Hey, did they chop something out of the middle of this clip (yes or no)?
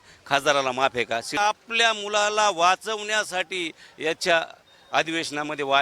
yes